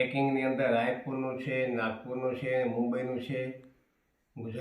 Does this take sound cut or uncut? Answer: uncut